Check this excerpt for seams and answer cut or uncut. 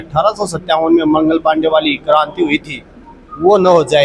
uncut